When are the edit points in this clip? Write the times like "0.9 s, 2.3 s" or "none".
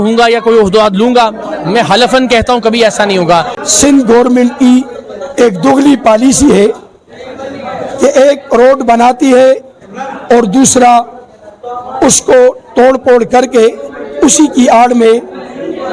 3.6 s